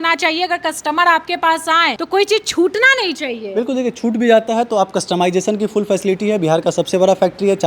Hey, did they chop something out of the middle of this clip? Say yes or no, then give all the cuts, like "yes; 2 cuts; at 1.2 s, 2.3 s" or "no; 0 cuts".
yes; 1 cut; at 2.0 s